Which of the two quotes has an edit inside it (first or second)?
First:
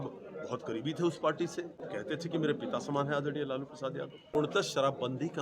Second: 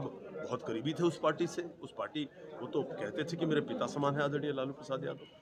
first